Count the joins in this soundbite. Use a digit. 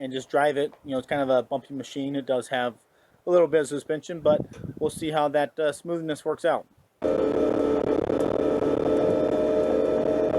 1